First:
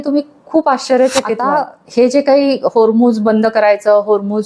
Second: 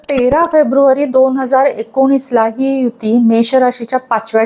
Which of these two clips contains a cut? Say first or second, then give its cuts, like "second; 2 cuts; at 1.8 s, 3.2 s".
first; 1 cut; at 1.4 s